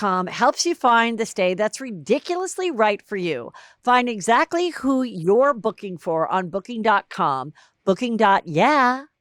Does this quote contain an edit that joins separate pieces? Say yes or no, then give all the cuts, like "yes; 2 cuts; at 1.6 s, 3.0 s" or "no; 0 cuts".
no; 0 cuts